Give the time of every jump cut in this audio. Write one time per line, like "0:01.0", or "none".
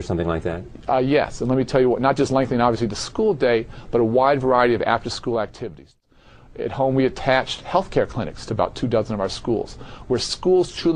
none